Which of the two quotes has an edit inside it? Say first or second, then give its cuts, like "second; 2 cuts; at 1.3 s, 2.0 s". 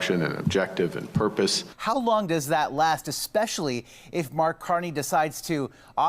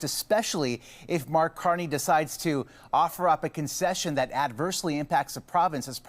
first; 1 cut; at 1.7 s